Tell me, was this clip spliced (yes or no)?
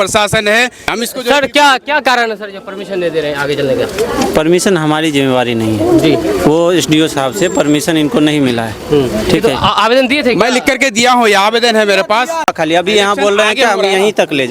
yes